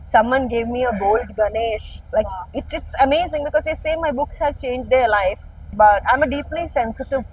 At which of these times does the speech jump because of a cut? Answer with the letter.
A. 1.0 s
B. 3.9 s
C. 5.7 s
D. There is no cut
C